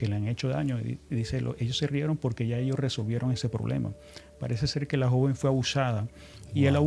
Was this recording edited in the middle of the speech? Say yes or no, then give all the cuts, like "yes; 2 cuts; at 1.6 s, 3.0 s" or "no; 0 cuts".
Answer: no; 0 cuts